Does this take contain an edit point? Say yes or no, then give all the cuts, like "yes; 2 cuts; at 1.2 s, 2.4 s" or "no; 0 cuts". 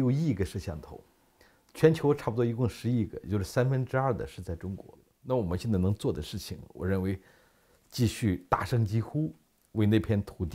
yes; 1 cut; at 5.1 s